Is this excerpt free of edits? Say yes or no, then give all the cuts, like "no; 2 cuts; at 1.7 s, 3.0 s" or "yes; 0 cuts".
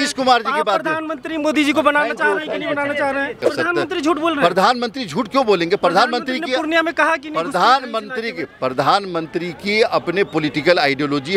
no; 1 cut; at 3.4 s